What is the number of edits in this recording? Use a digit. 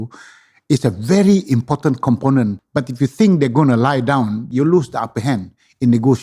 2